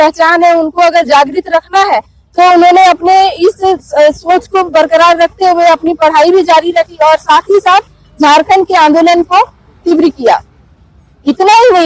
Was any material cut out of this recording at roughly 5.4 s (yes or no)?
no